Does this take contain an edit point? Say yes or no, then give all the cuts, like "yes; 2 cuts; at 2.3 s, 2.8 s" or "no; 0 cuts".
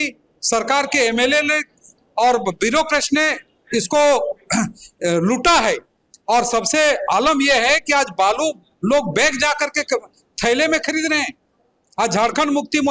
no; 0 cuts